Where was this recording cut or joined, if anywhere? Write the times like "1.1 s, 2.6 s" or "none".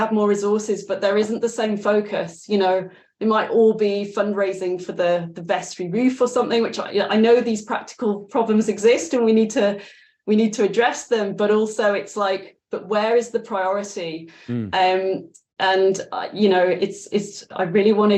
none